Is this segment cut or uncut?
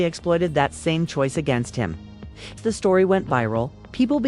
cut